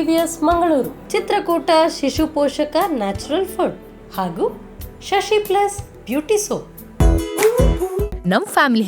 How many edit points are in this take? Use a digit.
1